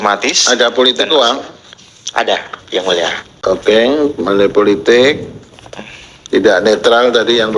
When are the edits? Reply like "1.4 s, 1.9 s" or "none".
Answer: none